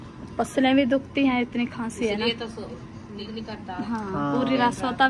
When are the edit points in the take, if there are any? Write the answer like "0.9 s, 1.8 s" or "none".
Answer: 3.2 s